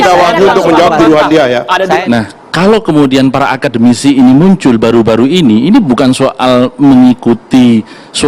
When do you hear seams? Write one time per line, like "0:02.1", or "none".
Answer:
0:02.0